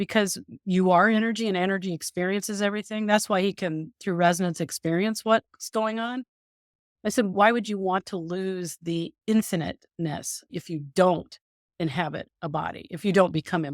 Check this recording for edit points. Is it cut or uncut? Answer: cut